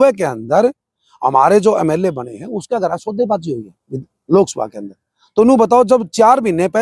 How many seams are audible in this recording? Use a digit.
0